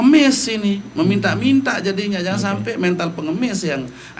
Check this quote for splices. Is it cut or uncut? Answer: uncut